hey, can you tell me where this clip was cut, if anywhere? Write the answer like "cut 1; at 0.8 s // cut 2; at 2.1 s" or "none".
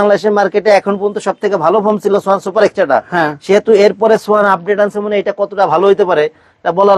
none